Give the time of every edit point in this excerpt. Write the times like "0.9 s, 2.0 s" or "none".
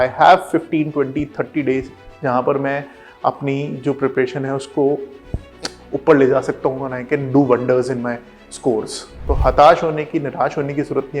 9.1 s